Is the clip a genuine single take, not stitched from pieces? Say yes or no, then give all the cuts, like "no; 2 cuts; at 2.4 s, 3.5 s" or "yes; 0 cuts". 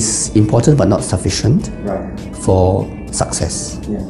yes; 0 cuts